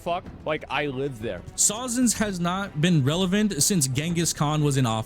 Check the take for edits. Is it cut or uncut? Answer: cut